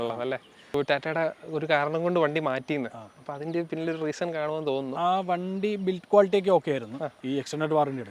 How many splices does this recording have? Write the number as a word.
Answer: two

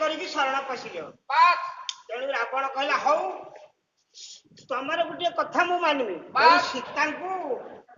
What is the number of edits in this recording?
zero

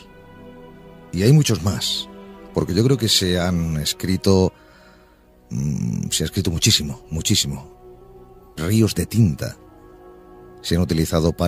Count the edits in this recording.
one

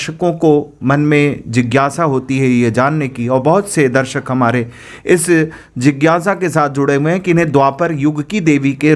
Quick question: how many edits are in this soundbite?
zero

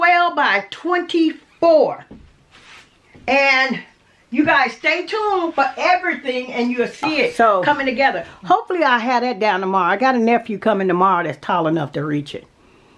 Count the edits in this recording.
one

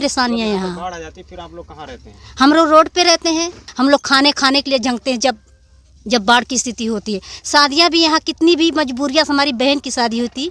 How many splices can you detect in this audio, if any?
one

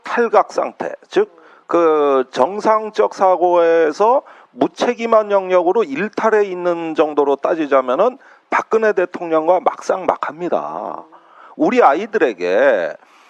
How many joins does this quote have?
one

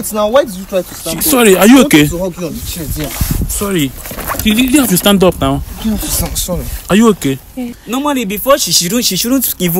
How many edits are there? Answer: one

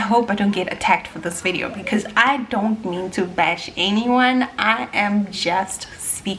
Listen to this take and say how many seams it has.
zero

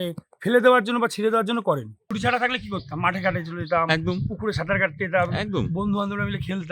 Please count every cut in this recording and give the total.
one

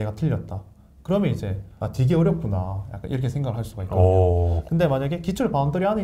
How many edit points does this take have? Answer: one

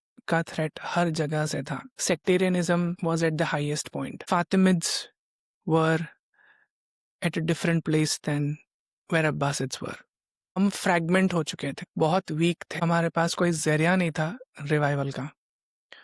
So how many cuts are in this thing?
six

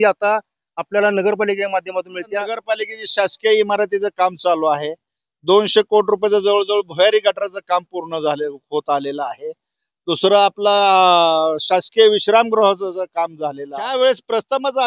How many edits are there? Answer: two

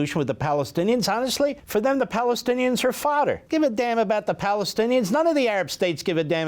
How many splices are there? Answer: two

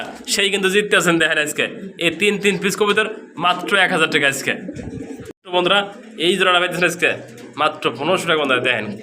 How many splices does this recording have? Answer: one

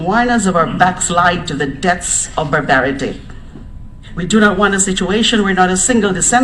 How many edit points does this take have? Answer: one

